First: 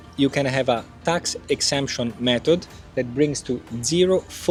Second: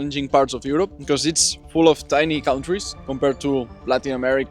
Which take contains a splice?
second; 2 cuts; at 1.0 s, 3.0 s

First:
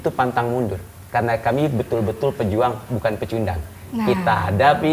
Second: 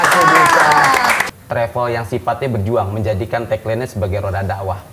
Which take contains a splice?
second; 1 cut; at 1.2 s

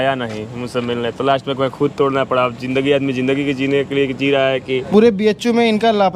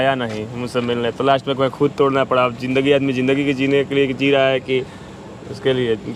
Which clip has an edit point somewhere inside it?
first; 1 cut; at 4.8 s

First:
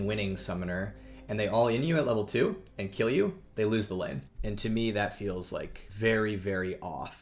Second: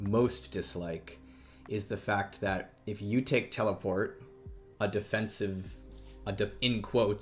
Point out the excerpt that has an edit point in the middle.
first; 2 cuts; at 4.3 s, 5.8 s

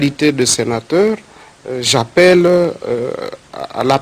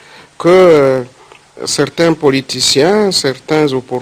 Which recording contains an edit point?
first; 1 cut; at 2.6 s

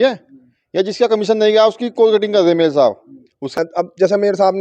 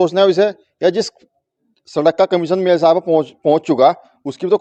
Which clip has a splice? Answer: first; 1 cut; at 3.6 s

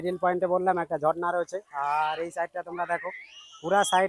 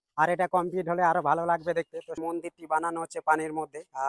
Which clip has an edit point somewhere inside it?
second; 1 cut; at 2.2 s

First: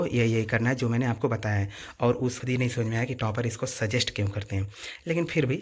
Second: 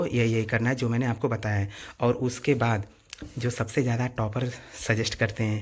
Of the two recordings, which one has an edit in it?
first; 1 cut; at 2.4 s

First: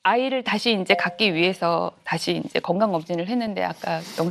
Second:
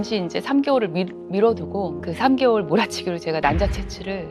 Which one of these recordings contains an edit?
second; 1 cut; at 2.0 s

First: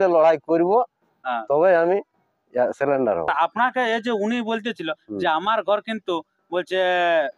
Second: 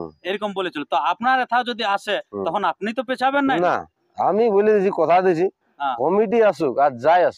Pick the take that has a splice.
first; 1 cut; at 3.5 s

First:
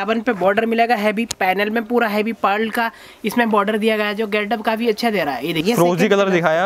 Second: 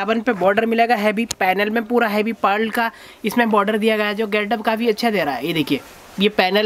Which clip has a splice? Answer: first; 1 cut; at 5.6 s

